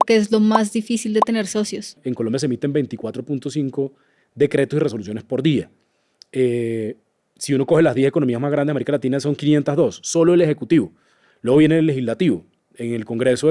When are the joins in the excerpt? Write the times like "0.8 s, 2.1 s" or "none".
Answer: 2.0 s

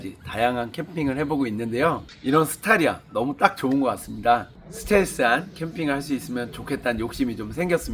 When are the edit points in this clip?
2.1 s, 4.6 s

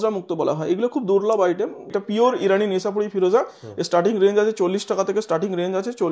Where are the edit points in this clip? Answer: 1.9 s

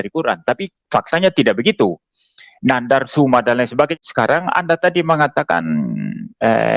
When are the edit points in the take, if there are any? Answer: 4.0 s

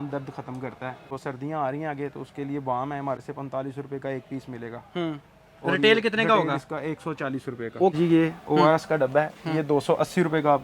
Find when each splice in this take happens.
1.1 s, 3.2 s, 7.9 s

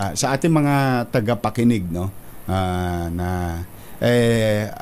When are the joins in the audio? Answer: none

